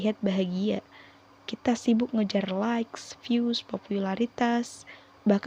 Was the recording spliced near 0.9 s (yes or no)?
no